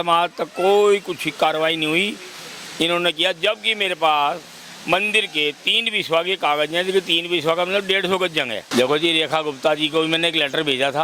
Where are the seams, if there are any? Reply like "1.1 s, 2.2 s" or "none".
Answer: 8.6 s